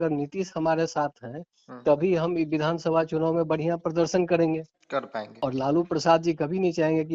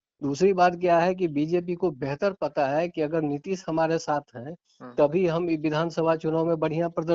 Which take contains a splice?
first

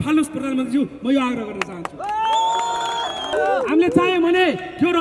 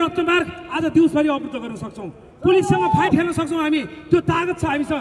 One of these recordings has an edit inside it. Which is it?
first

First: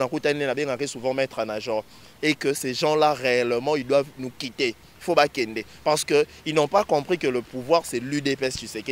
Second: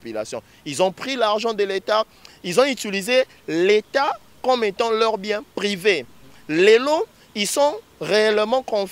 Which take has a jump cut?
first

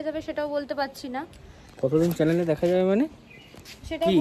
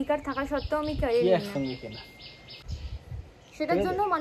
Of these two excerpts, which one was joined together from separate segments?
second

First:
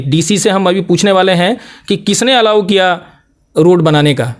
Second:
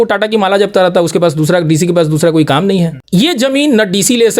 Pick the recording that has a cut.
second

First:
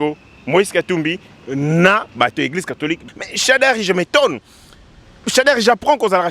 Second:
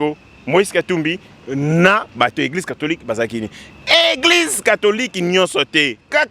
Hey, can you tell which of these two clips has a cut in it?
first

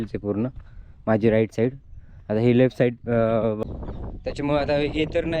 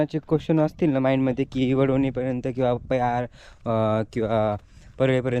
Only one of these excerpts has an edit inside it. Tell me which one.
first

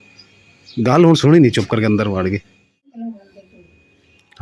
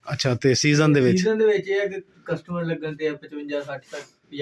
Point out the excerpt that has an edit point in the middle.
first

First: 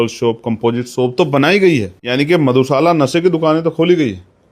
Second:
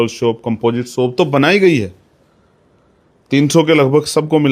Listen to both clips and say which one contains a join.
first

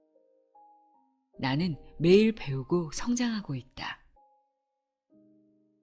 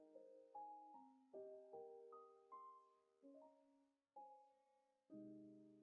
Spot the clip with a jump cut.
first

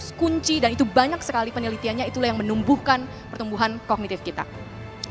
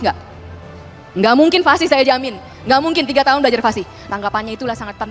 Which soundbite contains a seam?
second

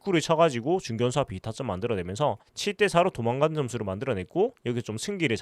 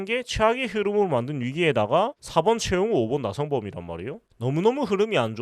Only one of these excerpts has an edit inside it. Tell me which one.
second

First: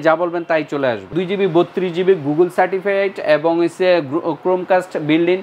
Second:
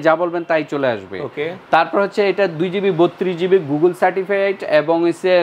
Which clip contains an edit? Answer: first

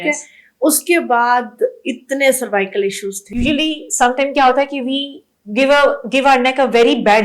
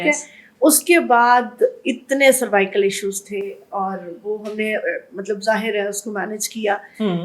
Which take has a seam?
first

